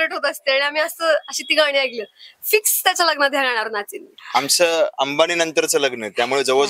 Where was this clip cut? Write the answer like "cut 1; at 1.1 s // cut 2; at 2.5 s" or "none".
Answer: cut 1; at 4.2 s

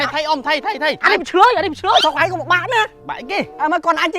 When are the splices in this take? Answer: cut 1; at 1.0 s // cut 2; at 2.0 s

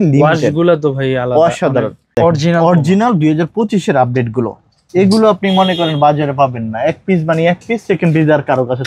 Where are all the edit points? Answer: cut 1; at 2.1 s

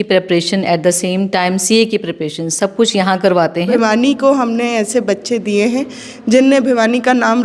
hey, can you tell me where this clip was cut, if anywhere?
cut 1; at 3.8 s

